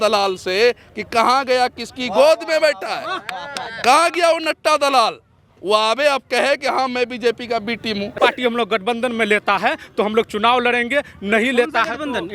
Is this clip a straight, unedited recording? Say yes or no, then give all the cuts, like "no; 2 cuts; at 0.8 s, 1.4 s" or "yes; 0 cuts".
no; 1 cut; at 8.2 s